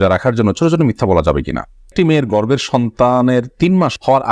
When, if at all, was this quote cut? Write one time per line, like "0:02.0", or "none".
0:01.8